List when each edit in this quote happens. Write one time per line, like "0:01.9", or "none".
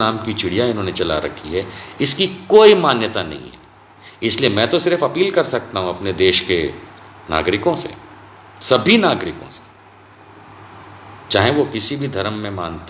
none